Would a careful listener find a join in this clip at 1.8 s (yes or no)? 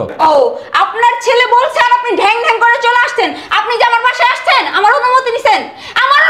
no